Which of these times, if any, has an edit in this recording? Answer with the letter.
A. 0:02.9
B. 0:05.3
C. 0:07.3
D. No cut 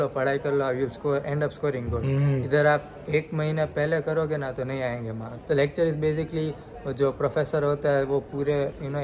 B